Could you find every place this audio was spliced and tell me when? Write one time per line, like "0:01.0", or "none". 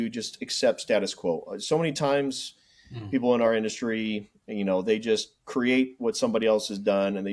none